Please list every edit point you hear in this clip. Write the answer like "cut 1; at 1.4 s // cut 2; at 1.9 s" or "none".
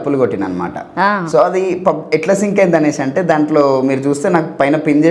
none